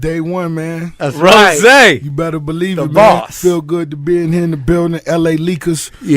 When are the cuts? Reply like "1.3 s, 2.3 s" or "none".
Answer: 2.4 s